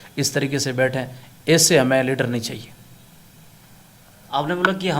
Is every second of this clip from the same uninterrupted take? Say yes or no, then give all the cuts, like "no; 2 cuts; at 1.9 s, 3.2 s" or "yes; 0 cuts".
yes; 0 cuts